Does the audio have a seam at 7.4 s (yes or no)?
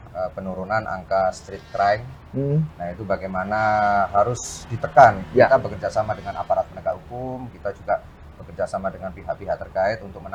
no